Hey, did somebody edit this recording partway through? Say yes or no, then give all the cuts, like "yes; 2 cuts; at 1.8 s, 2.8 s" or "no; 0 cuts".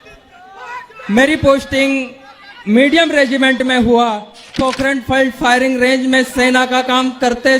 yes; 1 cut; at 4.5 s